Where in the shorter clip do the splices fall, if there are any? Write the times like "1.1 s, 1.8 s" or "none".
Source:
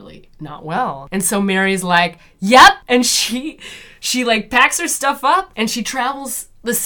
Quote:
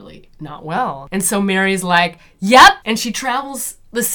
2.8 s